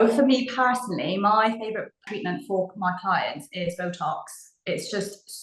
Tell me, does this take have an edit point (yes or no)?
yes